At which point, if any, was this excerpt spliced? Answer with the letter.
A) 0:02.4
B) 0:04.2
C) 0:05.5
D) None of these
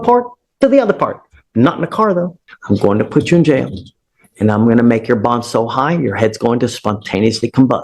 A